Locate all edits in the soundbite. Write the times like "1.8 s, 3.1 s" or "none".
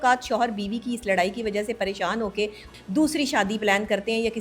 2.7 s